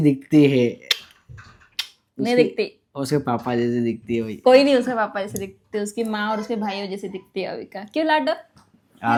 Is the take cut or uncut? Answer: uncut